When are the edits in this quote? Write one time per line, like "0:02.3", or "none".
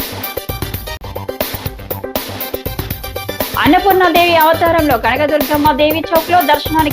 0:03.5